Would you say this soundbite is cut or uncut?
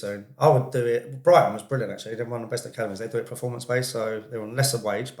uncut